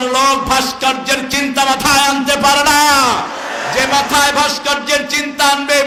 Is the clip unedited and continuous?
yes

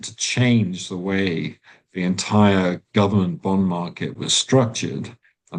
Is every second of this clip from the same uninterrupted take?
yes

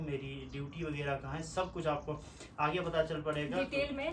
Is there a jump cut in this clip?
no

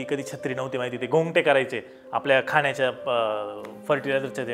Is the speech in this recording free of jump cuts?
yes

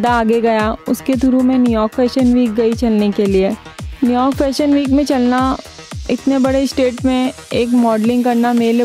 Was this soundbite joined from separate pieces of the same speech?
no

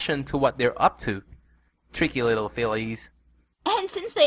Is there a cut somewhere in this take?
no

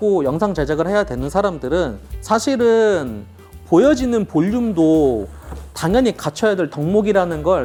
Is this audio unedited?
yes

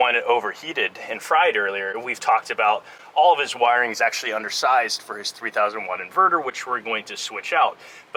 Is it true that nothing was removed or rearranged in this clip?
yes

